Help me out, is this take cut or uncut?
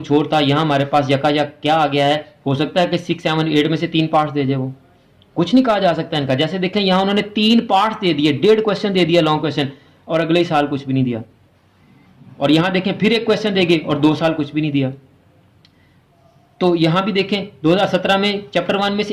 uncut